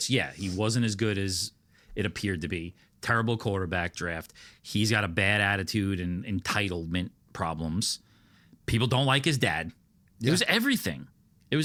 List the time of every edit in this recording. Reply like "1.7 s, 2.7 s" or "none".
none